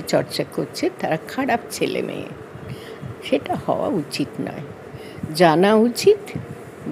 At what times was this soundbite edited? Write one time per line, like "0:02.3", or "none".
none

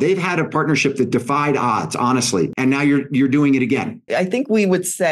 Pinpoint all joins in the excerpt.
0:02.5
0:04.0

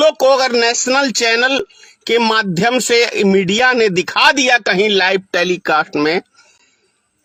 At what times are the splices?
none

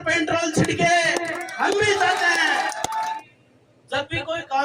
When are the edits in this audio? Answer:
0:03.2

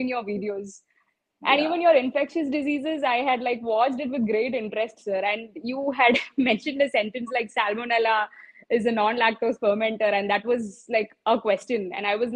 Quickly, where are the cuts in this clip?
none

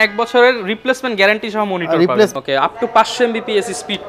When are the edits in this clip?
0:02.3

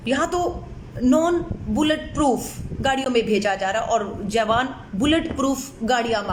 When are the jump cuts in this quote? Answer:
none

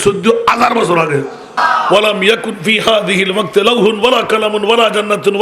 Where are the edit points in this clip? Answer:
0:01.6

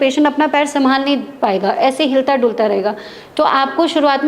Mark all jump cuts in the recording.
none

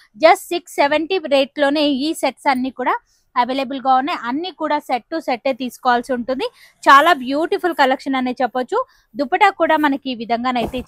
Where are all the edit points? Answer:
none

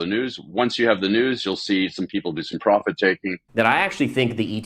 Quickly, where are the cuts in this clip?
0:03.4

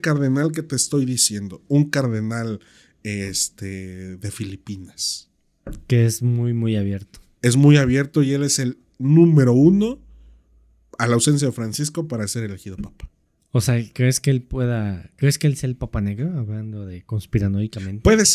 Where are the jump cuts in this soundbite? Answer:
none

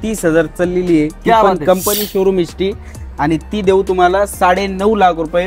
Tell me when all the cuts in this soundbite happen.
none

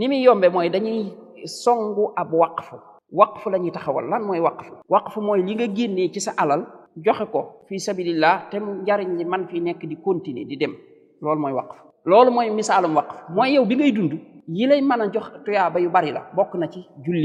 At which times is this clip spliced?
none

